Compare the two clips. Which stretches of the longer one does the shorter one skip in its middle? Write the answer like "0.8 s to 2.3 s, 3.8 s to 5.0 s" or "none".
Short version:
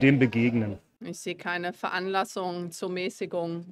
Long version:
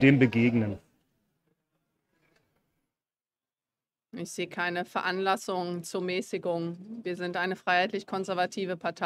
0.9 s to 4.0 s